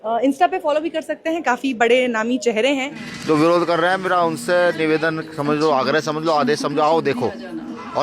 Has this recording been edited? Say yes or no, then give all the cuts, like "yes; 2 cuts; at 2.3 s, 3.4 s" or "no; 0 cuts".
yes; 1 cut; at 3.0 s